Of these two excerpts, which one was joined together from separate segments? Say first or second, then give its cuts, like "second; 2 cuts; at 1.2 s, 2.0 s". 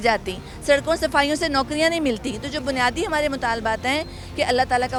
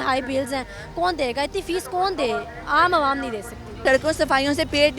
second; 1 cut; at 3.8 s